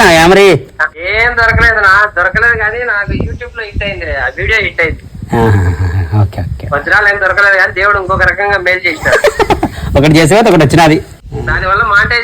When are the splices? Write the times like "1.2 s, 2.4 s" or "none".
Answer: 1.1 s, 11.2 s